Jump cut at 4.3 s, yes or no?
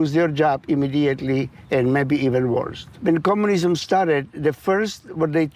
no